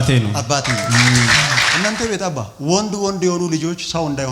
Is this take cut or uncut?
cut